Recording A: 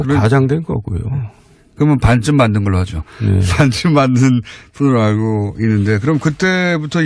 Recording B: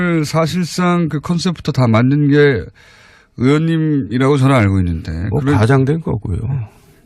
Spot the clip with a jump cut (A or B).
B